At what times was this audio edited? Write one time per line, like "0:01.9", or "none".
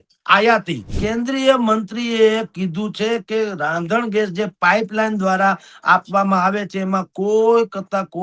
0:00.9

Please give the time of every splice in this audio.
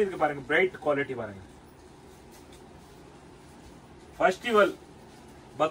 none

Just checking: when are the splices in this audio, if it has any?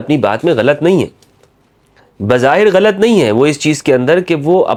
none

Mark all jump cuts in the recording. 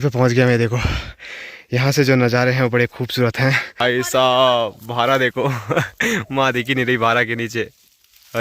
0:03.8

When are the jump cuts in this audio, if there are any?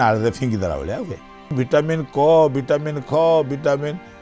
0:01.5

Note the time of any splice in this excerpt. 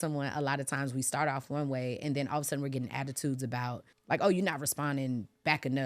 0:03.9

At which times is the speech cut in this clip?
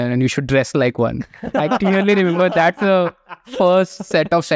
none

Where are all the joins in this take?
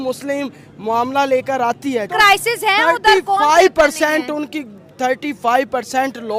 0:02.1

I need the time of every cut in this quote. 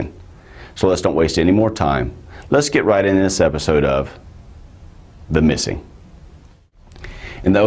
0:01.0

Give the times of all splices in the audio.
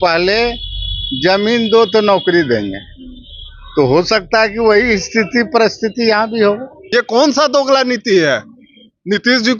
0:06.7

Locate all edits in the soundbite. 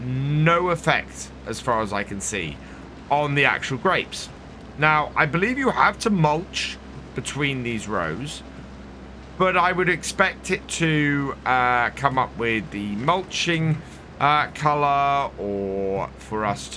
none

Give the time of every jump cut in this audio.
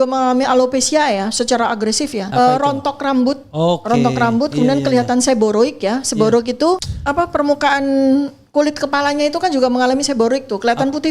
0:02.2
0:06.9

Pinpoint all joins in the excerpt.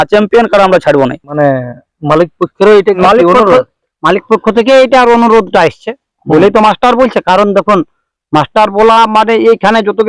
0:01.5
0:03.0

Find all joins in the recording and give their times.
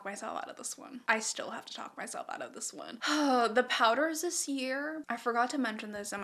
none

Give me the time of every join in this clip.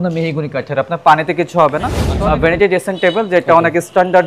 0:02.0

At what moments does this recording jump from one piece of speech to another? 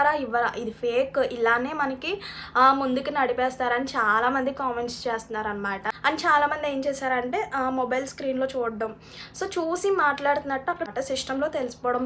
0:05.9
0:10.9

